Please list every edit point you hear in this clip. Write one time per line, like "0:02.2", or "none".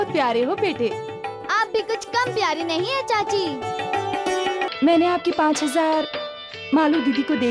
0:04.7